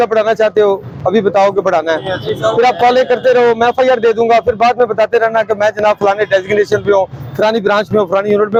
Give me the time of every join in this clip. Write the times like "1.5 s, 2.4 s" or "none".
none